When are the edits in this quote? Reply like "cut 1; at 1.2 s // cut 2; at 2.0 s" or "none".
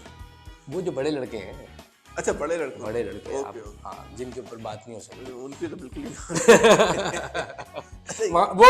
none